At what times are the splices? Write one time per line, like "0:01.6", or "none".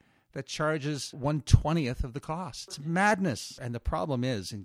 0:01.2
0:03.4